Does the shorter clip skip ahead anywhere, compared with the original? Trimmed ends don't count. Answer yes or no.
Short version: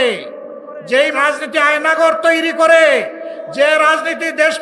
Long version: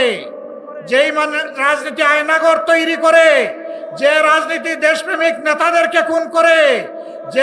yes